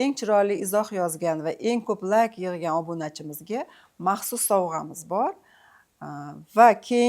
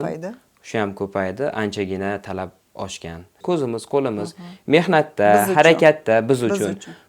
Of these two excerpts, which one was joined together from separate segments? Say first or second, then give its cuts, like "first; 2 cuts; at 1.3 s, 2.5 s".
second; 1 cut; at 3.3 s